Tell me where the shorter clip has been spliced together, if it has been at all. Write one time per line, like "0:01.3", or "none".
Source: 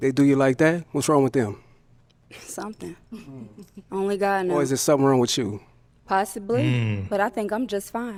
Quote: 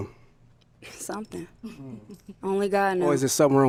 none